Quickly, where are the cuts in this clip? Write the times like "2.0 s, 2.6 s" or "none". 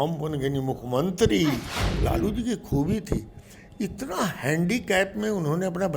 1.7 s